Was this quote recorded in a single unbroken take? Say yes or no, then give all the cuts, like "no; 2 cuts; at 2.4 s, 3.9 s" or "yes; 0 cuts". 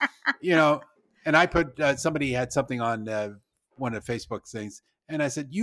yes; 0 cuts